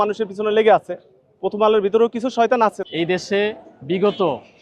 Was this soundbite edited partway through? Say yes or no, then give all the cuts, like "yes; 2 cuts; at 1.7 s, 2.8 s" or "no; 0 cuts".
yes; 1 cut; at 2.8 s